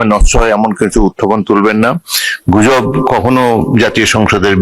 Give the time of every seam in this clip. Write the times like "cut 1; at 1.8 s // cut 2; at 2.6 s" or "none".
none